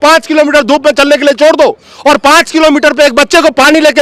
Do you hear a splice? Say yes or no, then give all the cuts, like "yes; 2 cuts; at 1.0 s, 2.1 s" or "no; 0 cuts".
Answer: no; 0 cuts